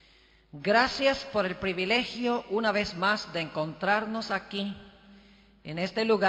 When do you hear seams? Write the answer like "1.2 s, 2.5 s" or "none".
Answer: 4.2 s